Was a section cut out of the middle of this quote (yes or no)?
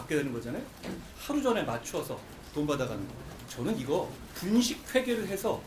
yes